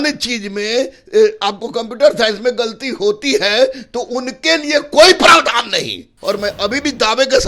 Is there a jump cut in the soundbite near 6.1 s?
yes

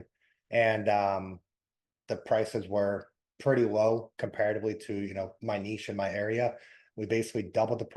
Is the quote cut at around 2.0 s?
no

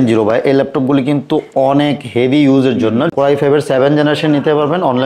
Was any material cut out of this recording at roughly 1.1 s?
no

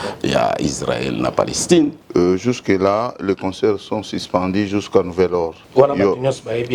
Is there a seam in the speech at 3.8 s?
no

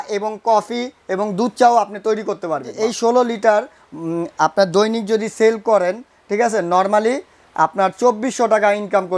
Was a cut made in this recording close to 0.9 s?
no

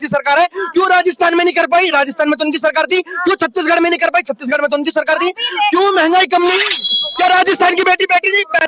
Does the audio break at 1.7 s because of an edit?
no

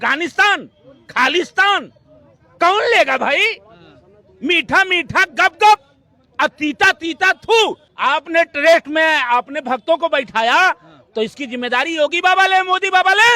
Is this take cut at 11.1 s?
no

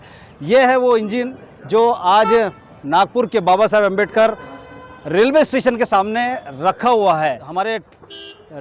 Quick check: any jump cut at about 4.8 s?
no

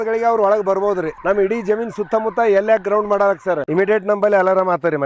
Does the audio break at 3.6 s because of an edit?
yes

